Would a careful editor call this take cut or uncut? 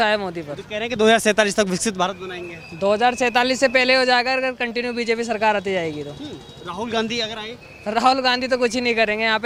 uncut